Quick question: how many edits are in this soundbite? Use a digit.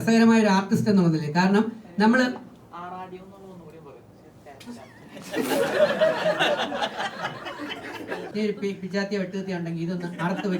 1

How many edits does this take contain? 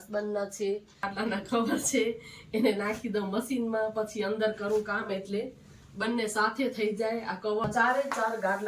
2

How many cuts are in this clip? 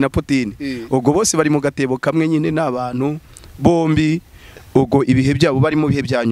0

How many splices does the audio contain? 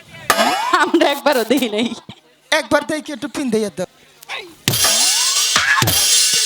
1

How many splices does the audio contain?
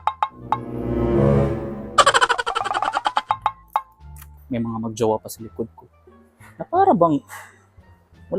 0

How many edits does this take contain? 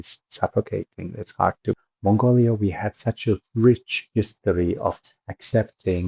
1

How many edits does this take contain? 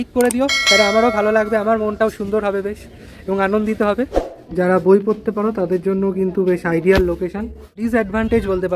2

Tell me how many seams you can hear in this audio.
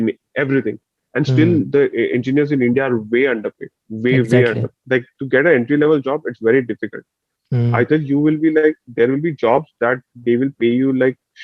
1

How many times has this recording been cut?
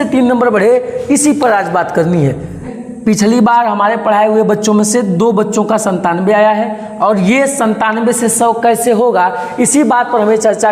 0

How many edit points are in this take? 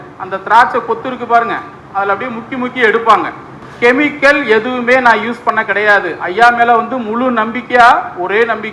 1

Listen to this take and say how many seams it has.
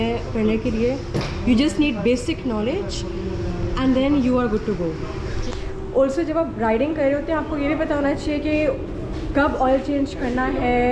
0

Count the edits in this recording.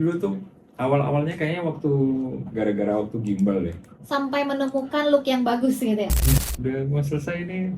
1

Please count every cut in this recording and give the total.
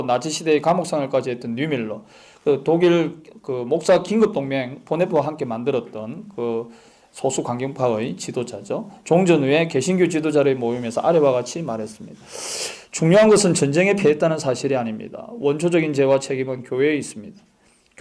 1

